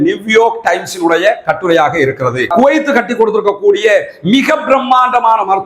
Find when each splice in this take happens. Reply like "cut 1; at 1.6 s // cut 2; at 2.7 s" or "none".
cut 1; at 2.5 s